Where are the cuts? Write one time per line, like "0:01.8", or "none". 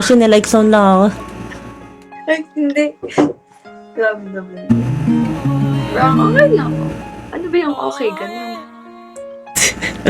none